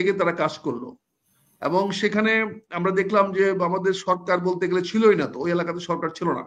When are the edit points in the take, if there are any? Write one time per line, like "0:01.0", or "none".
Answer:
none

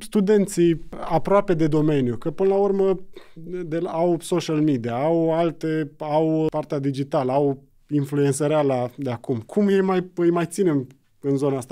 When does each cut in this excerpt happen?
0:00.9
0:06.5

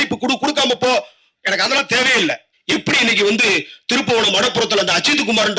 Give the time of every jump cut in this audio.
0:02.5

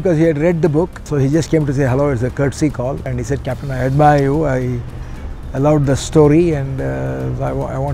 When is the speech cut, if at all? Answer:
0:01.0
0:03.1

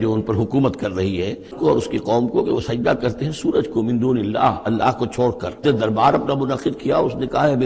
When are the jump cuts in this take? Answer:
0:01.5
0:05.6

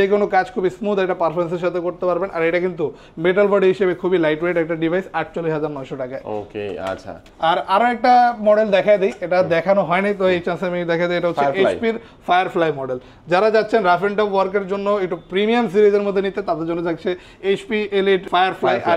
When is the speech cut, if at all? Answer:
none

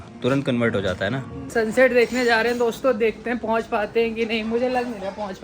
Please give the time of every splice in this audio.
0:01.4

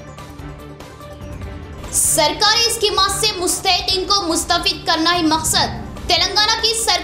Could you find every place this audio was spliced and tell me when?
0:01.4

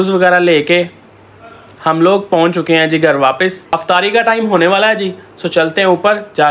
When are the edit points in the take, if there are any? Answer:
none

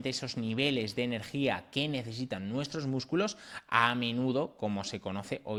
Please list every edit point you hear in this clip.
none

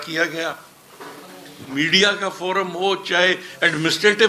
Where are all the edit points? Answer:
0:01.7

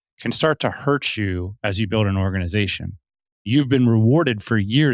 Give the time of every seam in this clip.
0:03.4

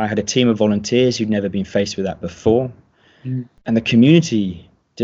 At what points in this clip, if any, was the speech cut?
0:03.5

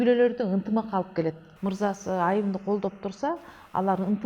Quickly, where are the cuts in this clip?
0:01.5

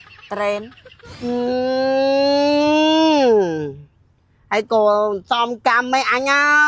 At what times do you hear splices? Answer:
none

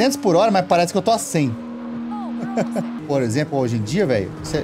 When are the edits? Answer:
0:03.0

